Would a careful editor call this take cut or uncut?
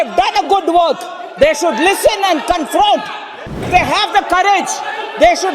cut